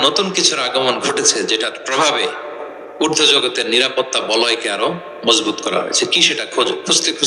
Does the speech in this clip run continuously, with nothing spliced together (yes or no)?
yes